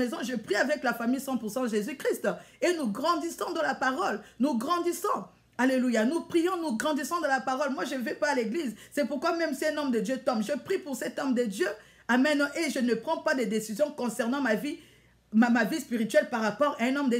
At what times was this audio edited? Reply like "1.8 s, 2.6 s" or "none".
none